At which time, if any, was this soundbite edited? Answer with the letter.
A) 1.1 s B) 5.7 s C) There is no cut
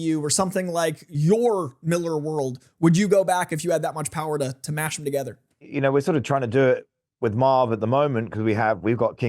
B